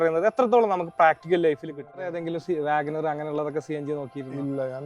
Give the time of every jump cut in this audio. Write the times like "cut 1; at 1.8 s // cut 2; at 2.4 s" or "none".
cut 1; at 2.2 s